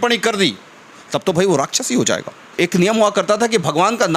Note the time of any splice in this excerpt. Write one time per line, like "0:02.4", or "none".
0:02.6

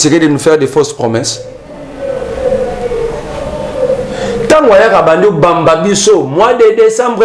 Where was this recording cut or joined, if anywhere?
none

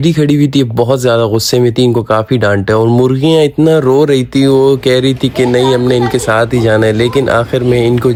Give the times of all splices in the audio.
none

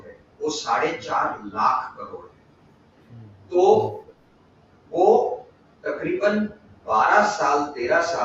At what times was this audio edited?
none

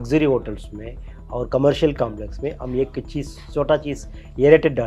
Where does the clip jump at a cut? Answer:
none

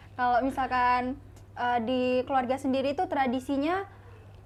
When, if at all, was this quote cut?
none

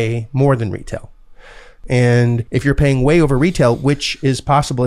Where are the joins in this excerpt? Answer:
0:01.7
0:02.4

